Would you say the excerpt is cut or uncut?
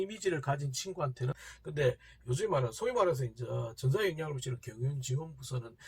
cut